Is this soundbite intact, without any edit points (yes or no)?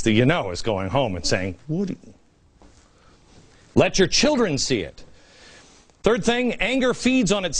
yes